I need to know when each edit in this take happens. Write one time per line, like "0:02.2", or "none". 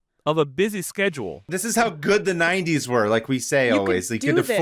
0:01.5